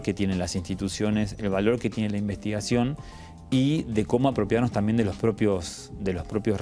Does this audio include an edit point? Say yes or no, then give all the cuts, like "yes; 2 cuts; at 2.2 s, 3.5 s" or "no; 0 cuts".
no; 0 cuts